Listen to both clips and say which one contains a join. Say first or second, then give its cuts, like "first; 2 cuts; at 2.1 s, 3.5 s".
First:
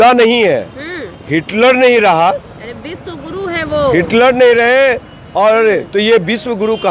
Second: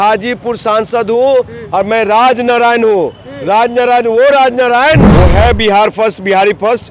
second; 1 cut; at 5.1 s